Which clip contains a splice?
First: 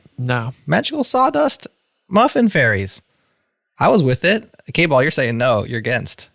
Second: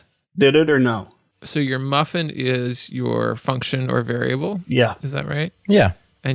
second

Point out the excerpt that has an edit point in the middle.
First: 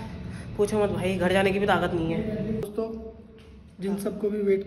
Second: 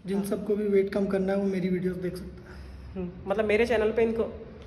first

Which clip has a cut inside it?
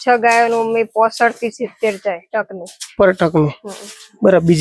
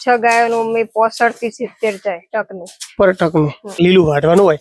second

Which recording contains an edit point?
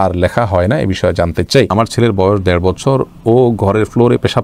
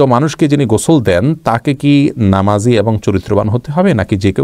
first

